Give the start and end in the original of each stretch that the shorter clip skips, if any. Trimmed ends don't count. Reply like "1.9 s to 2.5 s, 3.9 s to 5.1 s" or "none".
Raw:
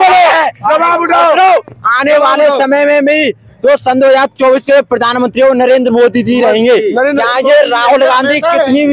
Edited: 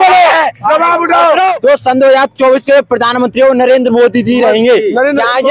1.6 s to 3.6 s